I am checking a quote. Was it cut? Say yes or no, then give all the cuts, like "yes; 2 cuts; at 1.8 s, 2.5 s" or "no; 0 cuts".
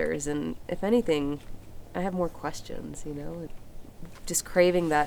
yes; 1 cut; at 3.5 s